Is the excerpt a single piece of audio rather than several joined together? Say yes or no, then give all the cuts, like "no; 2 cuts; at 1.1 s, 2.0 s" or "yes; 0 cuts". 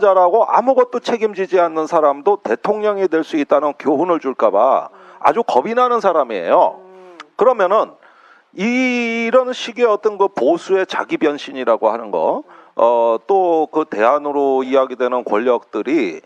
yes; 0 cuts